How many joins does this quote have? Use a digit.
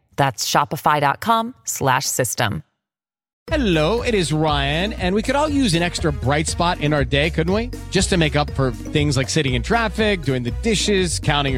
1